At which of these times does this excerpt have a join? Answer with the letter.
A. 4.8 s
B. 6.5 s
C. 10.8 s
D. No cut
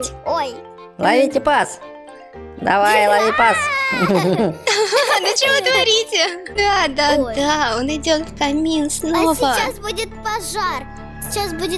B